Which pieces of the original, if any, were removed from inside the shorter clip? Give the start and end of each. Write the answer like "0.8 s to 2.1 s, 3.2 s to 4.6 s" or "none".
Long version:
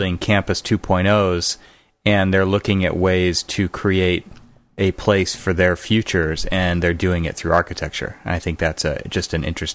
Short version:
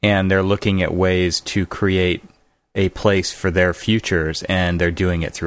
none